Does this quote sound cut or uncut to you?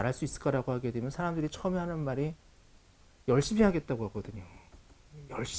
uncut